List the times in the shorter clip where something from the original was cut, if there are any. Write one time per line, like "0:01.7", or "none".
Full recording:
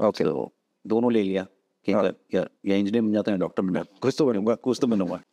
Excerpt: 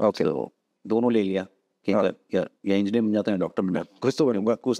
none